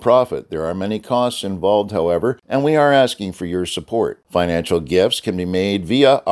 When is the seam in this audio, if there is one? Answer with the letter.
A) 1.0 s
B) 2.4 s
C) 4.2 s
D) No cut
B